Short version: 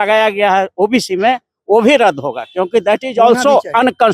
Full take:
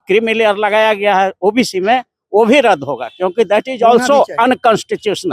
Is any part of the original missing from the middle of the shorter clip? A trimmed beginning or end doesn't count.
no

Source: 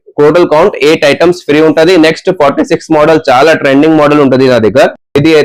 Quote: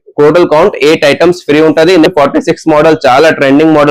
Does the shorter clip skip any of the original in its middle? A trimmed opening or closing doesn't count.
yes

